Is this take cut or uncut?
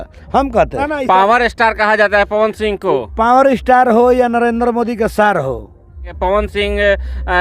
cut